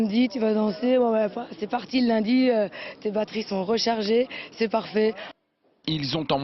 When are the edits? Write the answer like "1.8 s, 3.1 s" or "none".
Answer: 4.4 s